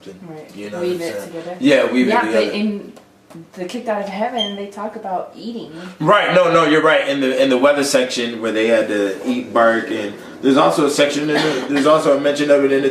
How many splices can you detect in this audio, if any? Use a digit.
1